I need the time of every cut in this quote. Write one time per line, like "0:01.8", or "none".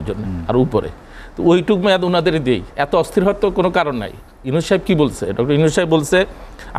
0:02.7